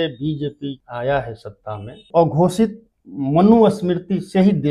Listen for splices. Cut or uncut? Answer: cut